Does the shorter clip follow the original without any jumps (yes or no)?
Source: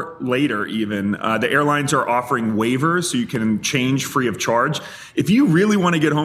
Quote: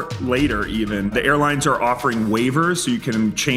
no